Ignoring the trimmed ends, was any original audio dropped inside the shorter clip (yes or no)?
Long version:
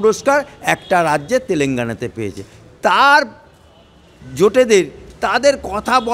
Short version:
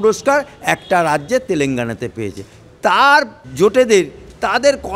yes